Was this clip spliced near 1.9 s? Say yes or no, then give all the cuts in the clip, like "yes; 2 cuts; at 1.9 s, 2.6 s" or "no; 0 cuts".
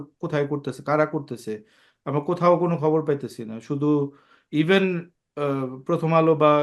no; 0 cuts